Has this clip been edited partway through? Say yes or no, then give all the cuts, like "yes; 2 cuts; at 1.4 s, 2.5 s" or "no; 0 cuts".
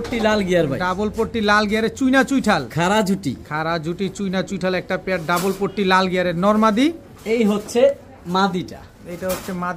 no; 0 cuts